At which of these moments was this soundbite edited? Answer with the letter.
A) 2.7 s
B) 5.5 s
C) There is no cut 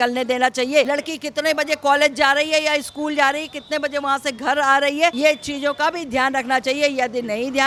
C